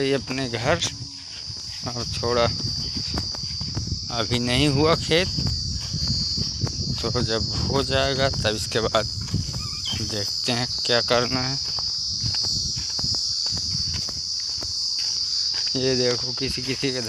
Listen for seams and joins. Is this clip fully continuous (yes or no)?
yes